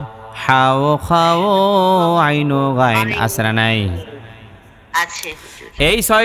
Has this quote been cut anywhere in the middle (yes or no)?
no